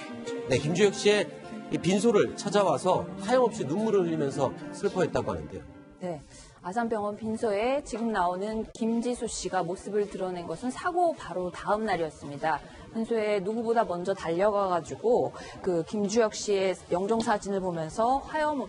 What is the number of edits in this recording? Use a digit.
0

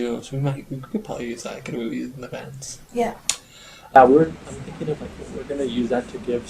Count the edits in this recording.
1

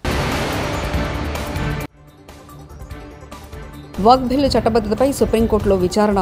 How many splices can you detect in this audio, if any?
1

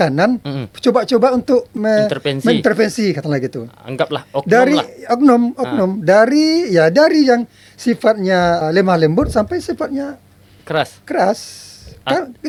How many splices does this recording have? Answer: 0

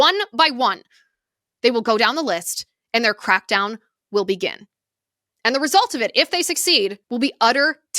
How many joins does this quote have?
1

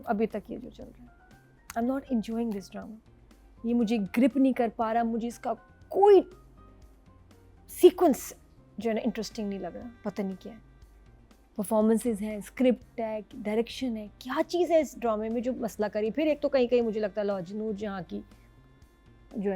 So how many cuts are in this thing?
0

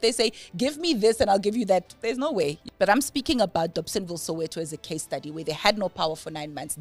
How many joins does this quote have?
1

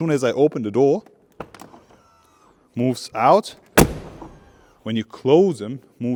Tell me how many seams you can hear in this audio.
0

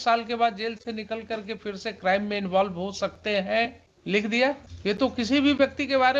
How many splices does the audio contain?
2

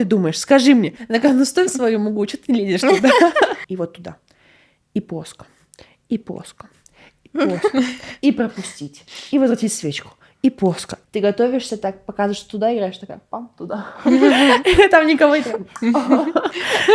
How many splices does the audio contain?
3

